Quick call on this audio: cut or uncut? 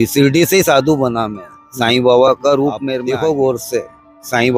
cut